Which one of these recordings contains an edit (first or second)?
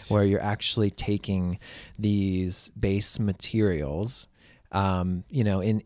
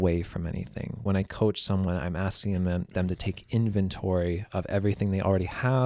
second